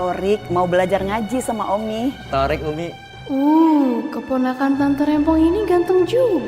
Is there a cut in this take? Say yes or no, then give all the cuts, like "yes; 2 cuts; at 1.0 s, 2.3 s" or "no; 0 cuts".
yes; 2 cuts; at 2.2 s, 3.1 s